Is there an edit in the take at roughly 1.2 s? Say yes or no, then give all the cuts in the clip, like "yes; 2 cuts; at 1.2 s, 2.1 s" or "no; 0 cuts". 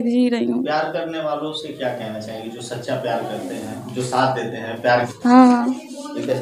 no; 1 cut; at 5.1 s